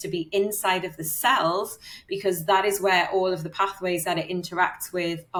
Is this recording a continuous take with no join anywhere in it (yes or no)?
yes